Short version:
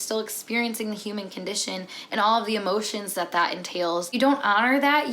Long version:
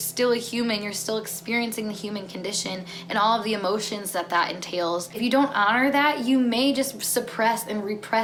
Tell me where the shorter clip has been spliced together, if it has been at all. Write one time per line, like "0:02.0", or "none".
0:04.1